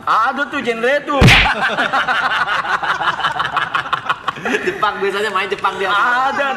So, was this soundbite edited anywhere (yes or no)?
no